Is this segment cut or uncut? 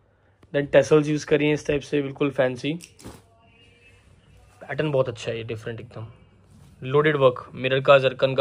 uncut